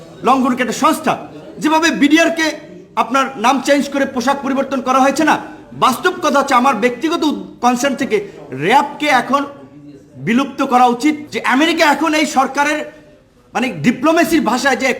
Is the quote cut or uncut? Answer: cut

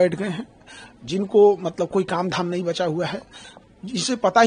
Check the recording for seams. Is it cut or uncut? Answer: uncut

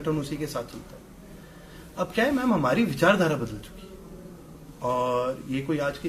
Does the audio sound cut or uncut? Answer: uncut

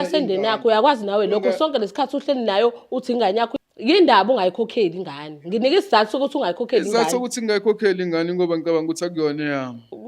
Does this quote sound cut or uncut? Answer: cut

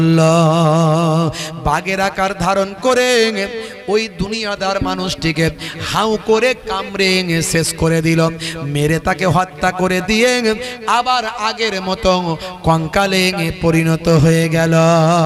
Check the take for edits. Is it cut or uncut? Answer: uncut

